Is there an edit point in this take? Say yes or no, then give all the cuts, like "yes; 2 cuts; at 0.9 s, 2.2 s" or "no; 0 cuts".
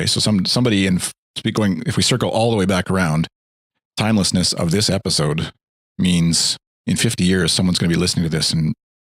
no; 0 cuts